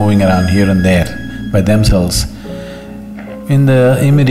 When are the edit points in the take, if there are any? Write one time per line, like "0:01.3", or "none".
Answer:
none

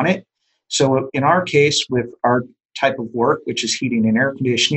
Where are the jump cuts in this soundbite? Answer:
0:02.7

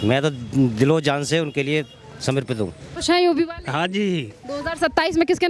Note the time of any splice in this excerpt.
0:02.9

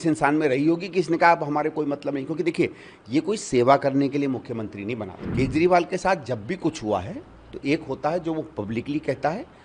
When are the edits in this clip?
0:05.2

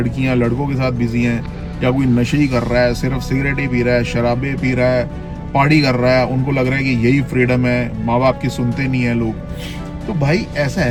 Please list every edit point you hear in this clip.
none

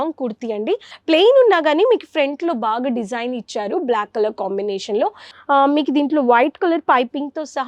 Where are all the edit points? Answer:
0:00.9
0:05.3

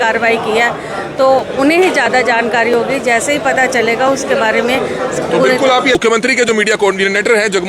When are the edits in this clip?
0:06.0

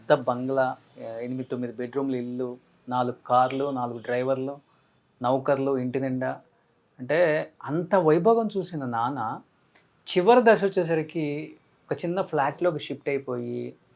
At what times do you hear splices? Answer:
0:00.9

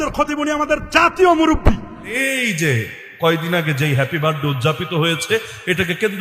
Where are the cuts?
0:02.2

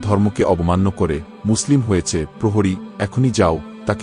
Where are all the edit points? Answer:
none

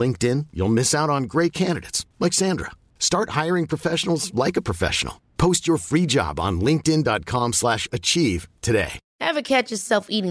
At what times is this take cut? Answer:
0:09.0

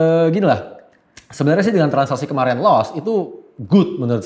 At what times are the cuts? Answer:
none

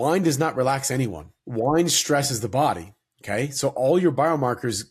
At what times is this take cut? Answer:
0:01.4

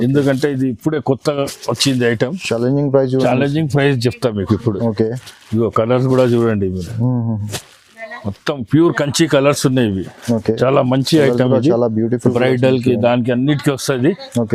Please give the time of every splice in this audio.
none

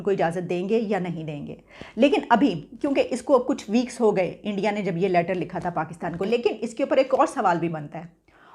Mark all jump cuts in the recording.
0:06.2

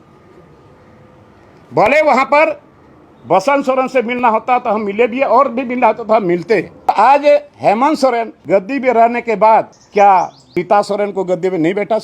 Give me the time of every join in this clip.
0:06.9
0:08.3
0:09.8
0:10.4

